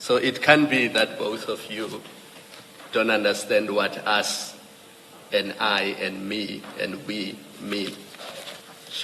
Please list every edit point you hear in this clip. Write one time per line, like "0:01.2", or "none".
none